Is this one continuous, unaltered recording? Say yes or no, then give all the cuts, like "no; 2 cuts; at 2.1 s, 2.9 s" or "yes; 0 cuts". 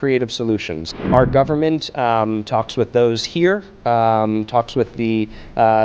no; 1 cut; at 1.1 s